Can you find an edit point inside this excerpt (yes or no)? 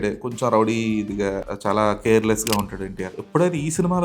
yes